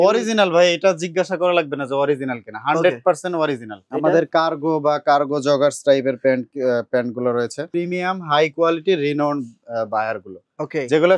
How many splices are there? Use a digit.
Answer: 2